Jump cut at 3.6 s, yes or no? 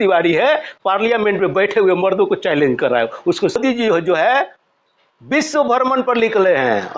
yes